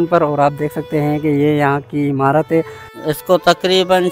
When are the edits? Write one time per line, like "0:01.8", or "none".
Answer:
0:02.8